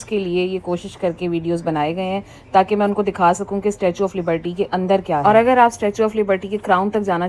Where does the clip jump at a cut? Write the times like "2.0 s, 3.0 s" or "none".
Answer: none